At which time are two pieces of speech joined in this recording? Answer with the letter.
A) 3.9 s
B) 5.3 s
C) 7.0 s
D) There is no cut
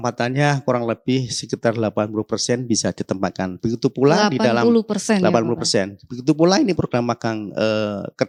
D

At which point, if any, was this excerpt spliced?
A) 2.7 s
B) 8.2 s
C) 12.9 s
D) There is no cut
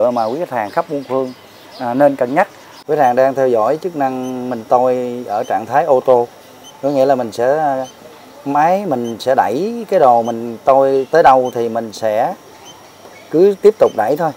A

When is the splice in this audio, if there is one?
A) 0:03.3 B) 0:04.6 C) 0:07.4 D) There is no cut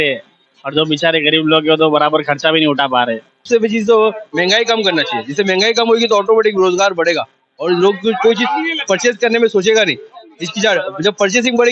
A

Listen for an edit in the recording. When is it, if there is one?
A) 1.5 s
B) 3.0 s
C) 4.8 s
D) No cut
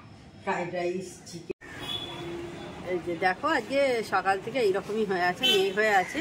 A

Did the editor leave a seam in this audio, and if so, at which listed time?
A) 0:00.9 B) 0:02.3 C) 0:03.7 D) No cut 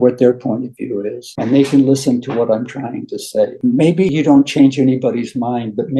C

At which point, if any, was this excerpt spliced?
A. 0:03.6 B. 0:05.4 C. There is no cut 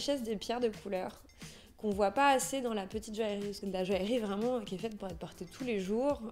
A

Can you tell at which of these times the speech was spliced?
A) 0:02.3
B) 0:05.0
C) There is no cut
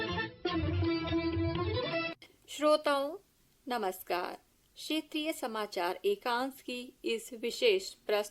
A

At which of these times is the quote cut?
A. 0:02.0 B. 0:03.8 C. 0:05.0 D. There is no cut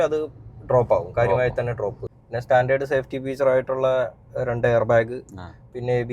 A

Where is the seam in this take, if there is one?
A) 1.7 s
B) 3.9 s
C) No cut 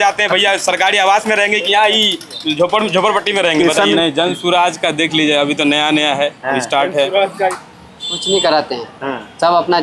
B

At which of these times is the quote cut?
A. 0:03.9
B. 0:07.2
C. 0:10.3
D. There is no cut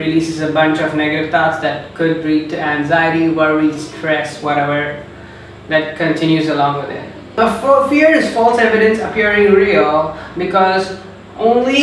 B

